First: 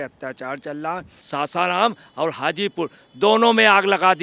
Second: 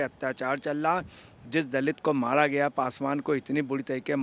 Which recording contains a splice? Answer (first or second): first